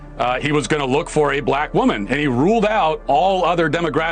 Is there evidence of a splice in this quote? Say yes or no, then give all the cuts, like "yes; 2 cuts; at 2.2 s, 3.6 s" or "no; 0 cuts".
no; 0 cuts